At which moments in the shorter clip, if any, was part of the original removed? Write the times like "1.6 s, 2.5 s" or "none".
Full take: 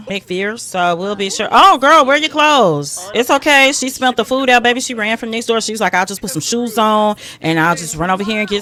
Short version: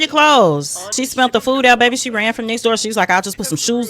0.9 s